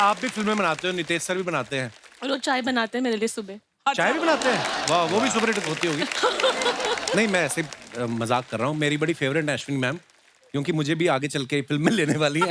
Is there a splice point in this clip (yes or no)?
no